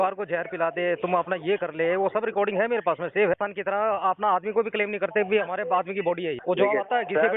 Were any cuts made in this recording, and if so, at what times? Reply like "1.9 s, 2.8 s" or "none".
3.3 s, 6.4 s